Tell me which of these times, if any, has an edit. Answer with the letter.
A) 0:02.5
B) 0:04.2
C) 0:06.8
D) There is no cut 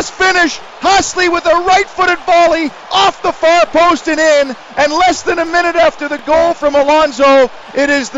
B